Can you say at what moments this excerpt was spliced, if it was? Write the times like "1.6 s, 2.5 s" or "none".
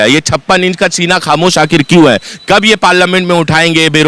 none